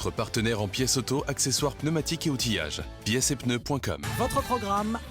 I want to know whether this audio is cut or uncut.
cut